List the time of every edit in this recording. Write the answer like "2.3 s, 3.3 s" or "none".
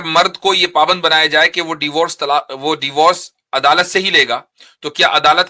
none